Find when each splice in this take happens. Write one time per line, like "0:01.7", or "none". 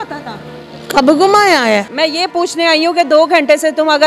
0:01.9